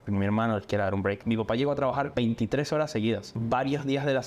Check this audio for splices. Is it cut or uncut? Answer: cut